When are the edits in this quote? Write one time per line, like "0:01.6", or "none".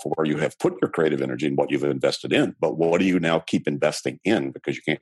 none